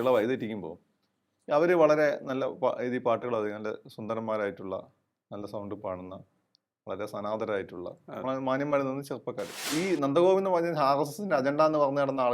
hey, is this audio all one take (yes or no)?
no